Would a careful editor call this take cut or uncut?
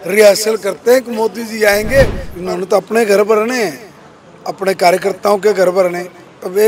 cut